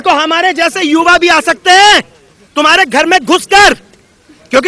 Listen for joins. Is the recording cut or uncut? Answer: uncut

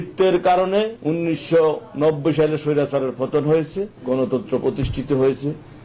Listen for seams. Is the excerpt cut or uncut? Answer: cut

